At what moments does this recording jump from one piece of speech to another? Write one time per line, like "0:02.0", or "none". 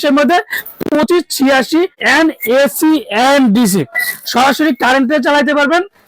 0:02.0